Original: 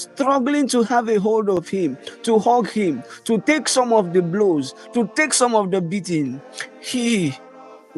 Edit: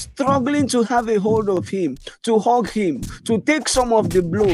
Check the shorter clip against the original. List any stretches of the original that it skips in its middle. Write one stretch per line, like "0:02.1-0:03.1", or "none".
none